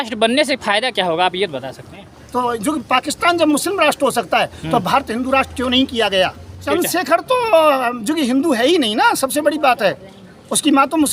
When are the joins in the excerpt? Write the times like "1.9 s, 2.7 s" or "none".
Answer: 2.2 s, 6.6 s